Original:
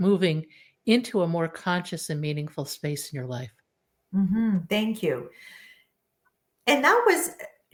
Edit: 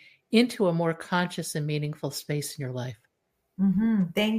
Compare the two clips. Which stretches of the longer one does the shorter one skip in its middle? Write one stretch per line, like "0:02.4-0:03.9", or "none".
none